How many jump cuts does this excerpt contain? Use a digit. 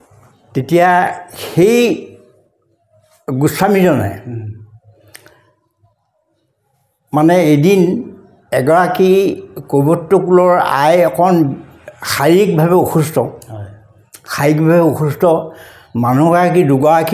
0